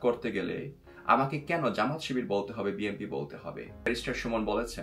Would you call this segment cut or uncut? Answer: cut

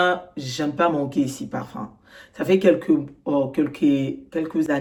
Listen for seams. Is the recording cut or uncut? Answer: uncut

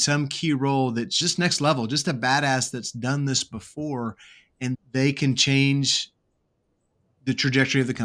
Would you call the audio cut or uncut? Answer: cut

